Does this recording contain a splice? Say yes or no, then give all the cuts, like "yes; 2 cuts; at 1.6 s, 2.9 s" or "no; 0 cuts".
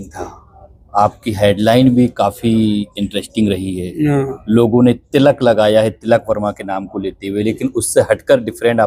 no; 0 cuts